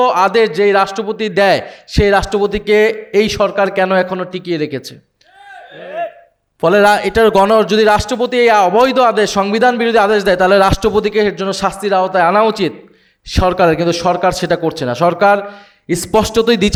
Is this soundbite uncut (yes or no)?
yes